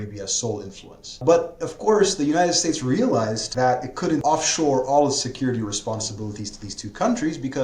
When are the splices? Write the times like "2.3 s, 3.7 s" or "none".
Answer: 1.2 s, 3.4 s, 4.2 s